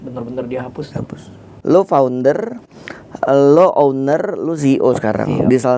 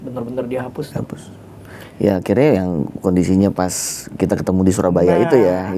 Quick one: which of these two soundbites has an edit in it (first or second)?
first